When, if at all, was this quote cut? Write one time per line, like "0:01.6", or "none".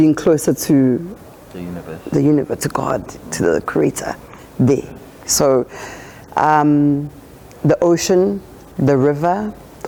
none